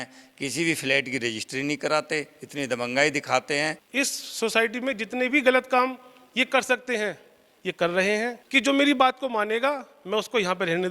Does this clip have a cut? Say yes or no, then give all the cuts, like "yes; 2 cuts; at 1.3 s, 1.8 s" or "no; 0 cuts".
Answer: yes; 2 cuts; at 3.8 s, 8.4 s